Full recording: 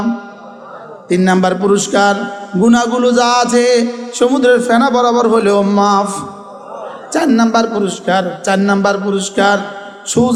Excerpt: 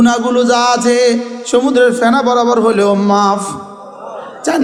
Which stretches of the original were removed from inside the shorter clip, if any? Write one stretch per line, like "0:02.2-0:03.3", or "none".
none